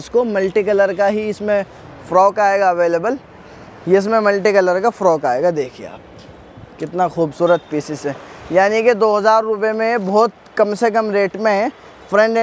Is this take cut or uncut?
uncut